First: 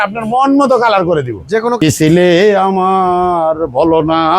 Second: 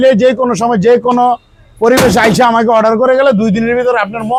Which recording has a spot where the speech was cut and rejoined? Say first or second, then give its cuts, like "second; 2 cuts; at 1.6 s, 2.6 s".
first; 1 cut; at 1.8 s